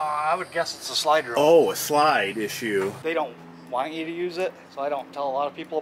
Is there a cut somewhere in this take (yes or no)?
yes